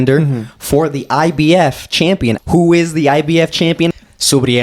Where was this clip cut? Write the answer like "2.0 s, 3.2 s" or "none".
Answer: 2.4 s, 3.9 s